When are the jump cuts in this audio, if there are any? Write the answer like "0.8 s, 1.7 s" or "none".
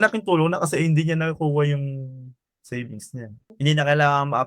3.4 s